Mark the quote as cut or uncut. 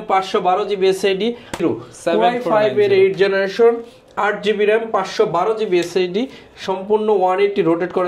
cut